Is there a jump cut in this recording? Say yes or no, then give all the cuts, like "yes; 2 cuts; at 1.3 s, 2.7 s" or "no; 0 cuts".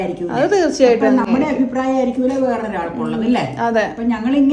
no; 0 cuts